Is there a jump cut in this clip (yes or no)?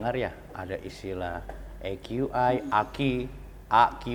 no